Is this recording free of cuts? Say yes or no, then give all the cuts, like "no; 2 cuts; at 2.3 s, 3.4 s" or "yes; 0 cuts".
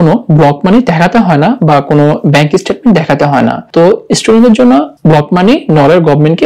no; 2 cuts; at 3.6 s, 4.9 s